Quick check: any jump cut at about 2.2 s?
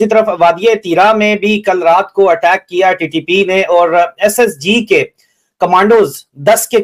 no; 0 cuts

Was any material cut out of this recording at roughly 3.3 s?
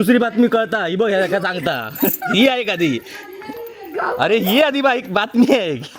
no; 0 cuts

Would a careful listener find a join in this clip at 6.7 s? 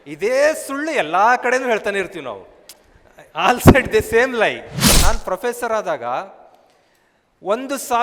no; 1 cut; at 4.9 s

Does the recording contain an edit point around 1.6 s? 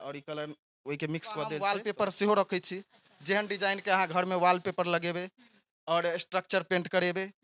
yes; 1 cut; at 1.6 s

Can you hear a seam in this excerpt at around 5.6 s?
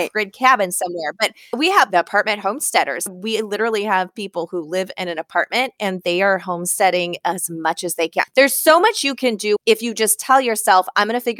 no; 4 cuts; at 1.5 s, 3.1 s, 8.3 s, 9.6 s

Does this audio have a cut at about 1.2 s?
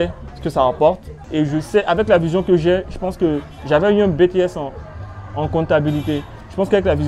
yes; 1 cut; at 1.2 s

